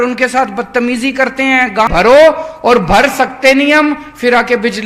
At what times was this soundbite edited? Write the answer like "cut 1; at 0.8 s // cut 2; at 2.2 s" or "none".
cut 1; at 1.9 s